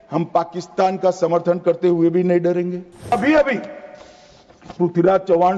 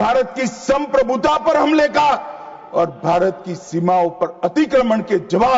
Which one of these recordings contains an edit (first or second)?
first